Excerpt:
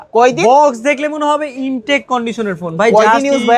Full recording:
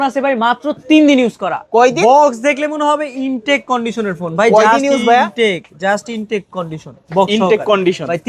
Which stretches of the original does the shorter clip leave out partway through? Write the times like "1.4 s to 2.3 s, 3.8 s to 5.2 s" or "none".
none